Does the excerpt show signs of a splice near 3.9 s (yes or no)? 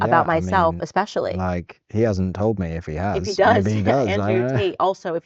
yes